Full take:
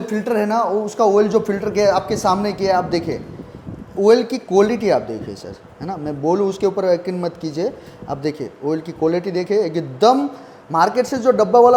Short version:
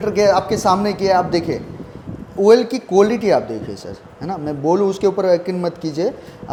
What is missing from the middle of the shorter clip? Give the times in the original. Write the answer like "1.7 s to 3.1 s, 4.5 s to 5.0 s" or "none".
none